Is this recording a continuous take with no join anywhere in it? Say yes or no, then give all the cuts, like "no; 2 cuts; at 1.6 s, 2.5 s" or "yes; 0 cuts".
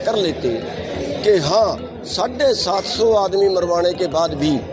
yes; 0 cuts